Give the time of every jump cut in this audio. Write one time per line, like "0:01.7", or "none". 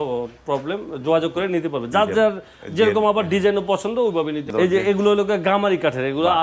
0:04.5